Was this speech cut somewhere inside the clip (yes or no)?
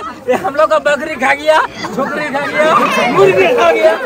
no